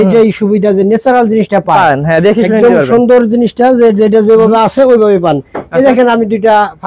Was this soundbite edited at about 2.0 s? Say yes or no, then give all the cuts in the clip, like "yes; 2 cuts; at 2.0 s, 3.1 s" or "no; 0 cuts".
no; 0 cuts